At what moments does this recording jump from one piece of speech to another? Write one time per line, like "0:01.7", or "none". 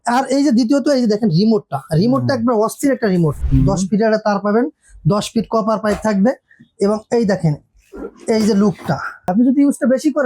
0:03.4
0:09.3